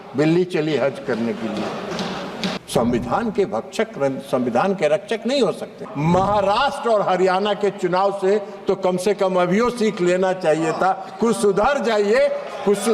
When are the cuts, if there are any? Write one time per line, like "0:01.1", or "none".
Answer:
0:02.6
0:05.8